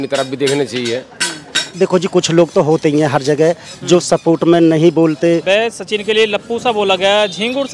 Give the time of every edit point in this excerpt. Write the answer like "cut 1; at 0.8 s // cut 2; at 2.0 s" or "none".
cut 1; at 1.6 s // cut 2; at 5.4 s